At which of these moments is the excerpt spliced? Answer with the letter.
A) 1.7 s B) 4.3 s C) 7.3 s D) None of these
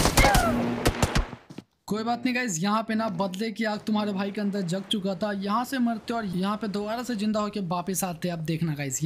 A